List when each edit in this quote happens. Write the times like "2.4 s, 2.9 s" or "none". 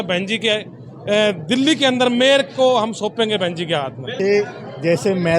none